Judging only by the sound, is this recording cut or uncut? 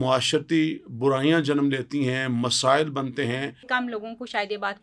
cut